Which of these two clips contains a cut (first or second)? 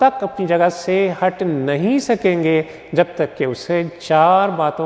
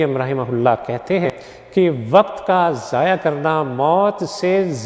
second